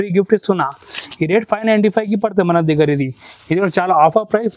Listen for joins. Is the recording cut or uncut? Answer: uncut